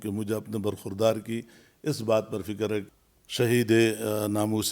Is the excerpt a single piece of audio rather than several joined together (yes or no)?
no